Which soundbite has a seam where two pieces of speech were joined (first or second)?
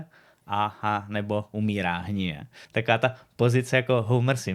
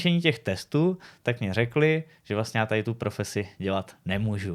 first